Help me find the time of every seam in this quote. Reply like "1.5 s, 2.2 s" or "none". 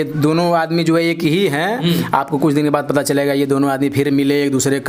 none